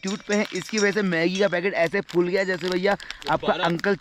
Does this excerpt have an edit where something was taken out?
no; 0 cuts

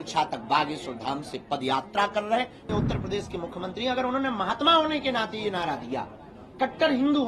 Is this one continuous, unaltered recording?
no; 1 cut; at 2.7 s

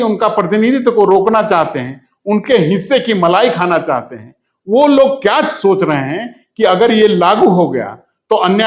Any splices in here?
no; 0 cuts

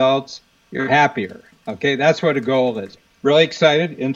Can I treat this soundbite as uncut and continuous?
no; 1 cut; at 3.0 s

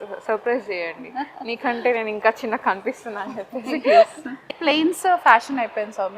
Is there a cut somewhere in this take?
yes; 1 cut; at 4.7 s

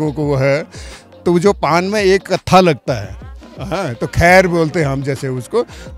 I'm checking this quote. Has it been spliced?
no; 0 cuts

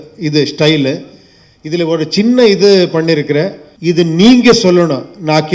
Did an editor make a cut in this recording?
yes; 1 cut; at 3.6 s

